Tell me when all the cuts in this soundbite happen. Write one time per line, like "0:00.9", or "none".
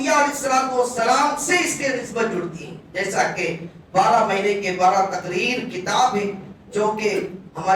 none